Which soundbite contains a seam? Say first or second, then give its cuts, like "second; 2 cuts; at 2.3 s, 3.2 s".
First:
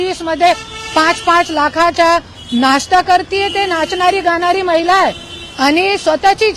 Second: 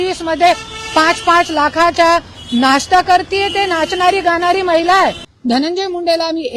second; 1 cut; at 5.3 s